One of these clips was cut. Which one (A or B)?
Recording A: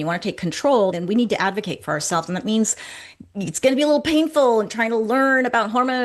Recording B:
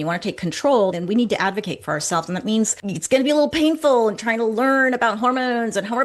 B